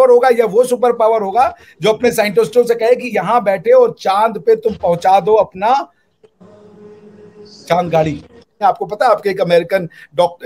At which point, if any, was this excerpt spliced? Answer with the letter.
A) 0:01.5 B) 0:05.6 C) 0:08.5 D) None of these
C